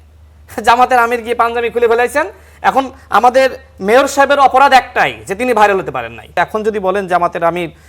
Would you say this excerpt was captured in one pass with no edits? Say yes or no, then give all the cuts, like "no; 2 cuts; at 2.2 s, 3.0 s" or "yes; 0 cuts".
no; 1 cut; at 6.2 s